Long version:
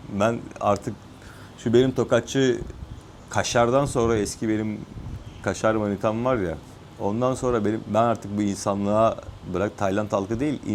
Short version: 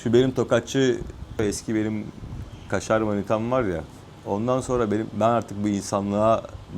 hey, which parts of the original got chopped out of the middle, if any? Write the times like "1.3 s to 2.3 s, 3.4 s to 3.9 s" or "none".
3.0 s to 4.1 s